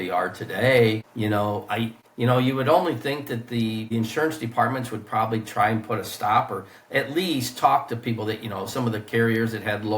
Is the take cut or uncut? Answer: cut